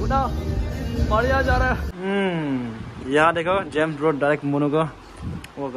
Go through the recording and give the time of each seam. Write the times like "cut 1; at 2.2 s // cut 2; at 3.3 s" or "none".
cut 1; at 1.9 s

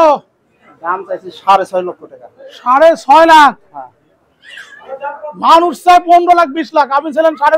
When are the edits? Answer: none

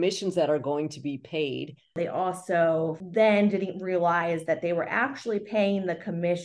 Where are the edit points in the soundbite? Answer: cut 1; at 2.0 s // cut 2; at 3.0 s

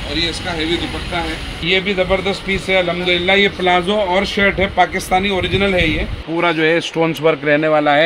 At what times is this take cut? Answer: cut 1; at 1.5 s // cut 2; at 6.2 s

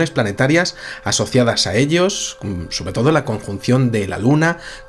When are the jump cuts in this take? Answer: cut 1; at 2.8 s

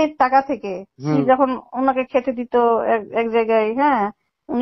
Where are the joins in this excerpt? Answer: cut 1; at 1.2 s

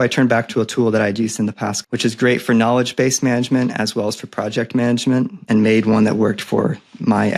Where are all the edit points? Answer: cut 1; at 1.7 s // cut 2; at 5.4 s

